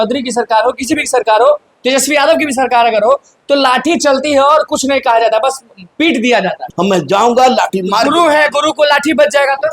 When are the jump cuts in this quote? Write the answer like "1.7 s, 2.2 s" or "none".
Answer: 6.6 s